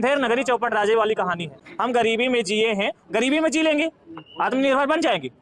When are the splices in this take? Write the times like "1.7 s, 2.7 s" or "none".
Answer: 1.5 s